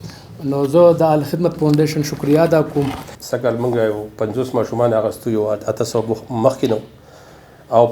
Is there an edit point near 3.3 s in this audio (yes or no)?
yes